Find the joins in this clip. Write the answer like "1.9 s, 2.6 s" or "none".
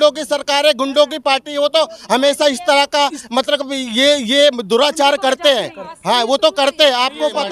none